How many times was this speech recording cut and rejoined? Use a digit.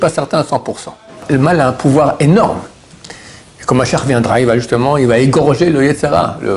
1